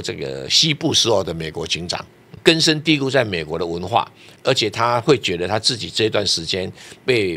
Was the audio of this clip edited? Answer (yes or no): yes